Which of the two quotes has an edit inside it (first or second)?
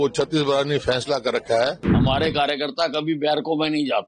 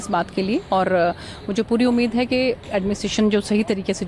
first